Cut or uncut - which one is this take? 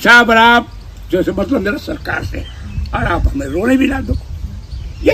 uncut